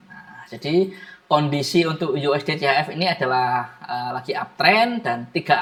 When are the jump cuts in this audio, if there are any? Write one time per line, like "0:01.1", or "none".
none